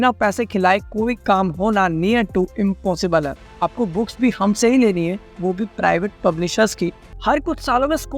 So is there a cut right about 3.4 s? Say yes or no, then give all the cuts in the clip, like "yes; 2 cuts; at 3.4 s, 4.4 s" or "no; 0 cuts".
yes; 2 cuts; at 3.4 s, 7.1 s